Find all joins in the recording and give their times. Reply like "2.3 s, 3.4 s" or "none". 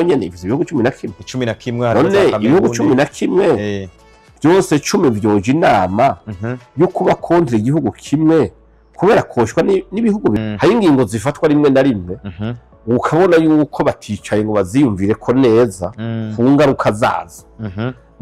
10.4 s